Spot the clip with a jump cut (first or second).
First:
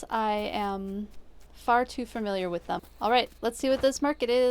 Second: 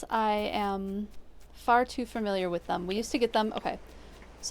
first